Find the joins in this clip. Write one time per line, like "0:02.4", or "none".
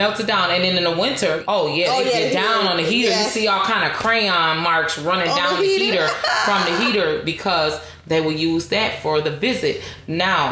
0:01.4